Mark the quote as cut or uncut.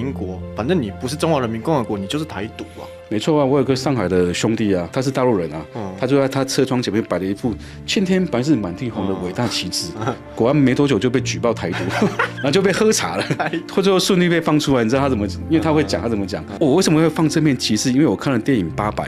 uncut